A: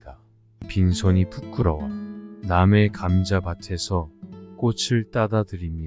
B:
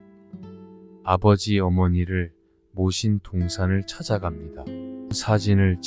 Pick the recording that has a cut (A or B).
B